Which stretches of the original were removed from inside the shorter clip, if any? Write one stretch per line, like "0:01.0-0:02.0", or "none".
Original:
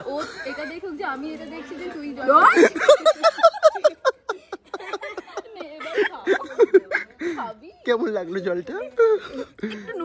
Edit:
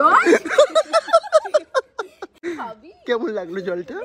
0:04.6-0:07.1